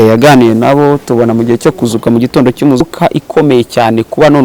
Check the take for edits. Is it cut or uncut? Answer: cut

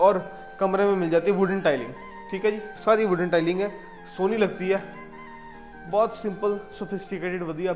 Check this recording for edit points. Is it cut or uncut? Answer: uncut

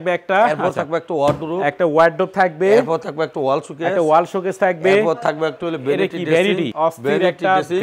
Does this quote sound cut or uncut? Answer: cut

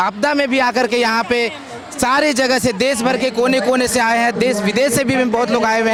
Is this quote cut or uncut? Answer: uncut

